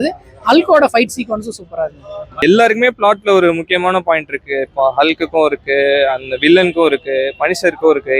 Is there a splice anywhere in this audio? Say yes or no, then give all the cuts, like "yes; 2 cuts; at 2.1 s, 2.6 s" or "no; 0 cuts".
yes; 1 cut; at 2.3 s